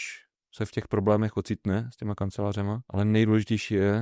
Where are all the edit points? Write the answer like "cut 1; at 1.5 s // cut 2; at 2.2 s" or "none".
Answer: cut 1; at 2.8 s

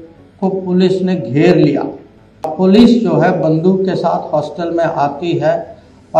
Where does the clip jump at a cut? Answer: cut 1; at 2.5 s

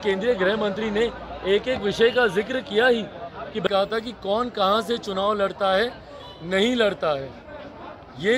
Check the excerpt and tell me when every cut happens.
cut 1; at 3.7 s

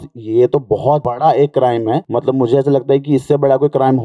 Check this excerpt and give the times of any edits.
cut 1; at 1.1 s // cut 2; at 2.0 s

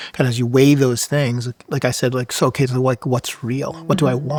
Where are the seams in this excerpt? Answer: none

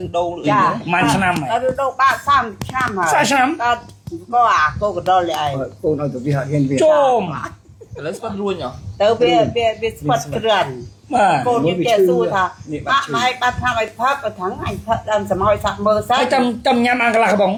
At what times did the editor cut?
none

